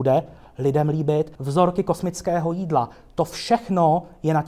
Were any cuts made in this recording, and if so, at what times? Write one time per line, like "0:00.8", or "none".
0:01.4